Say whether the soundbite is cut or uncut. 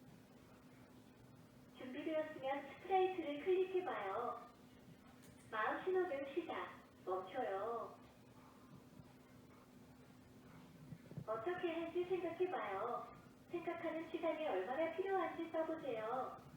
cut